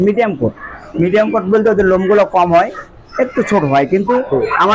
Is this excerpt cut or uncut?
uncut